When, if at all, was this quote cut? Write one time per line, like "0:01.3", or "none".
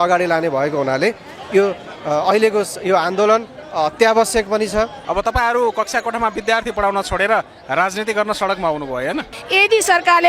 0:05.0
0:09.4